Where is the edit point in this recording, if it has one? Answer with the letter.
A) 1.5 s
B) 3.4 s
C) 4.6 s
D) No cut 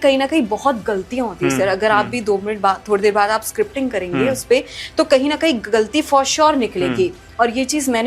D